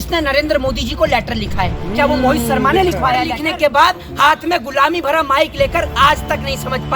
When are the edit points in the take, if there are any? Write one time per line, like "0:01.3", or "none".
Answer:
0:03.3